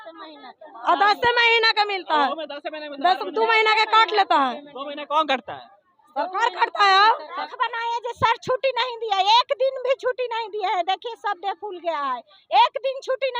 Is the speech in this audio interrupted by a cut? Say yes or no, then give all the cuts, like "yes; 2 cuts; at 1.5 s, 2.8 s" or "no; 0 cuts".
yes; 1 cut; at 7.4 s